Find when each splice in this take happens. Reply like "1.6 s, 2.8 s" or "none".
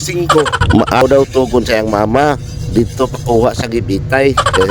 1.0 s